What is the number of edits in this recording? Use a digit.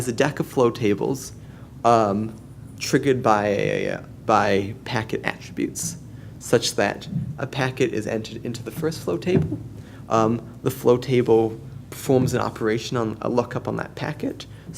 1